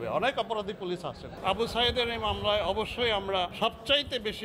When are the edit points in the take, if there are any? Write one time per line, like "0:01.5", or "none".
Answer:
0:01.4